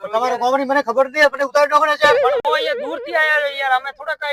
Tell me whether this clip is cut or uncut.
uncut